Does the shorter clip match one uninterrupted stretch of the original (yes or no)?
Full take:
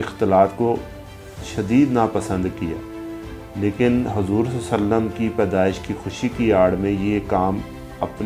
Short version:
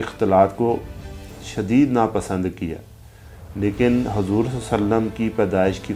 yes